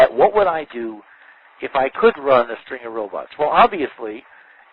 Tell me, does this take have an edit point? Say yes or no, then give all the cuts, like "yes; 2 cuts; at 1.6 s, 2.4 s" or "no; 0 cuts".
no; 0 cuts